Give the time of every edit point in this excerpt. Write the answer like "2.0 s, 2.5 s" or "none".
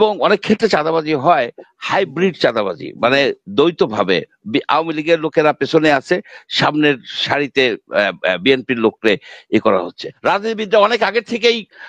10.1 s